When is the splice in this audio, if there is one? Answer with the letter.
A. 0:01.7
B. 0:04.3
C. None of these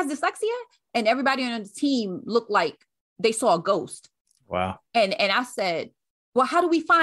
C